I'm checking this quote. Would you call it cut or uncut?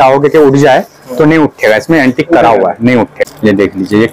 cut